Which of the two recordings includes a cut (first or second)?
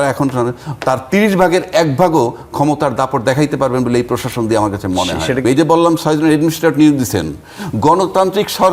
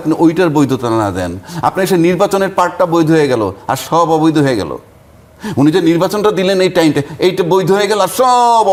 first